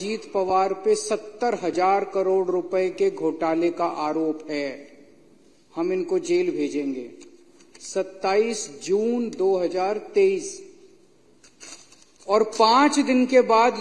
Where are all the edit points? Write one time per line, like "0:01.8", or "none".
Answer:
none

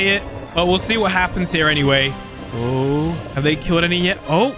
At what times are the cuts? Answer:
none

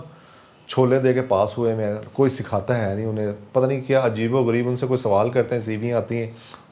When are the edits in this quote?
none

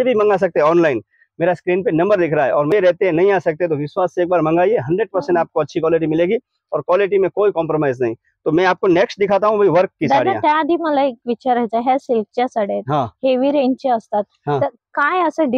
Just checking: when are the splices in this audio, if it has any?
none

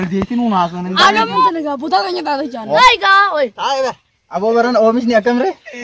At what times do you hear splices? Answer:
0:02.8

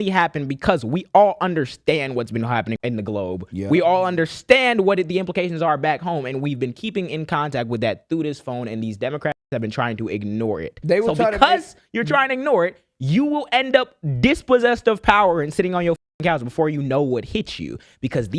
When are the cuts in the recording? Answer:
0:02.8

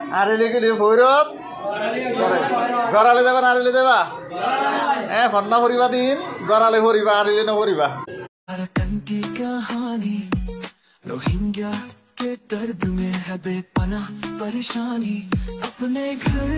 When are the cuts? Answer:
0:08.4

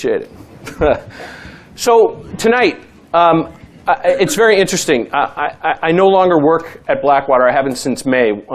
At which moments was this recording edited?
0:04.0

